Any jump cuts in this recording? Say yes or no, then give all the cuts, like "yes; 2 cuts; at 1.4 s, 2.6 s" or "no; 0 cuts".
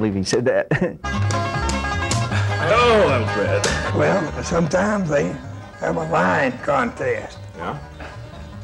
yes; 1 cut; at 1.0 s